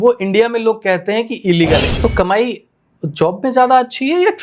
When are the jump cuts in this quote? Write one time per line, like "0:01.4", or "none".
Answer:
0:01.9